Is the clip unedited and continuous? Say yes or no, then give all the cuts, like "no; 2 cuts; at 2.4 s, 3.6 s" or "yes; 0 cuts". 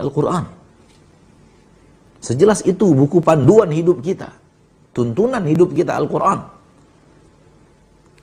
yes; 0 cuts